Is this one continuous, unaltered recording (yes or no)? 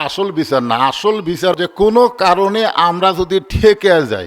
no